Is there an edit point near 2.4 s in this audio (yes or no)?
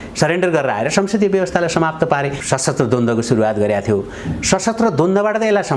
yes